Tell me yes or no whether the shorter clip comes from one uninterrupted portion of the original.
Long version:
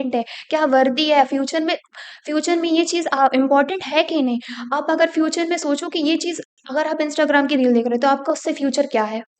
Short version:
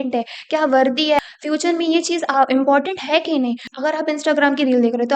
no